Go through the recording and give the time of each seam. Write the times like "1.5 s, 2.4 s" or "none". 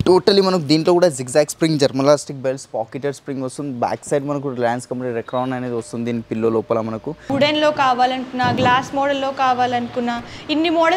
7.3 s